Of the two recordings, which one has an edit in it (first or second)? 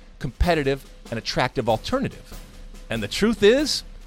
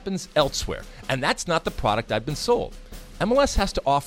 second